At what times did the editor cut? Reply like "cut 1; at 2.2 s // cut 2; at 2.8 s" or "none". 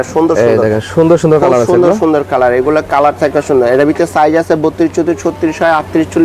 none